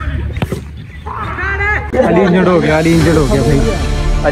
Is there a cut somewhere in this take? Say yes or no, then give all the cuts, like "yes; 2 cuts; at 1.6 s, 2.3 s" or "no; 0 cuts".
no; 0 cuts